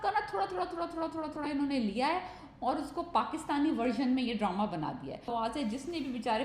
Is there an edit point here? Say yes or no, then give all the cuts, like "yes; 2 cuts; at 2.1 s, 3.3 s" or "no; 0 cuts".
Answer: yes; 1 cut; at 5.3 s